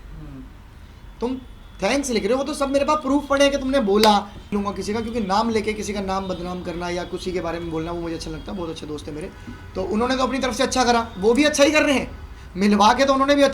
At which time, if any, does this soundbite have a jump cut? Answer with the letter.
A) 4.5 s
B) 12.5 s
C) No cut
A